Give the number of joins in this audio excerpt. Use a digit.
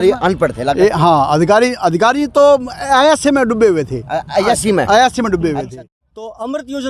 1